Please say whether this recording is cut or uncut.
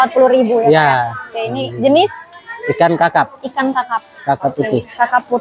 uncut